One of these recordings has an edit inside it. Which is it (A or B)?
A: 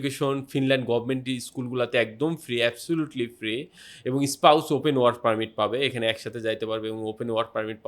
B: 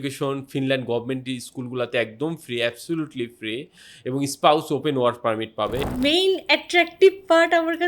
B